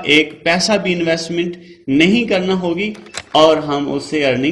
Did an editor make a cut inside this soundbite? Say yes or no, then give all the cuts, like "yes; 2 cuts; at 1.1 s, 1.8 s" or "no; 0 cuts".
no; 0 cuts